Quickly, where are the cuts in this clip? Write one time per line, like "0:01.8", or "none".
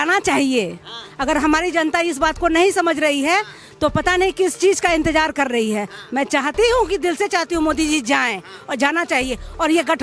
none